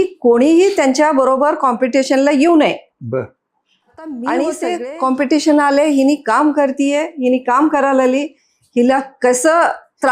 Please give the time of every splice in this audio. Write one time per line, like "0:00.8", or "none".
0:04.8